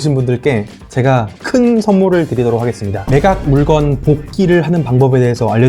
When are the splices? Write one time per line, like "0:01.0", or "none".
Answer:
0:02.9